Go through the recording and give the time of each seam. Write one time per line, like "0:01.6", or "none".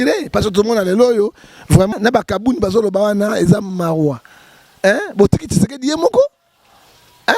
0:01.9